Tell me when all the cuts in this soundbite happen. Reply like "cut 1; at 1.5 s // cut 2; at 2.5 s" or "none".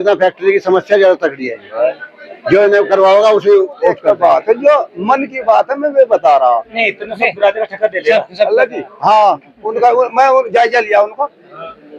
cut 1; at 4.0 s